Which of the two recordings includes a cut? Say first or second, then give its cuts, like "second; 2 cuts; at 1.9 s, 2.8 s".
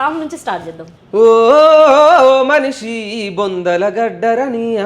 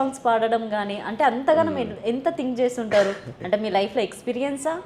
first; 1 cut; at 1.0 s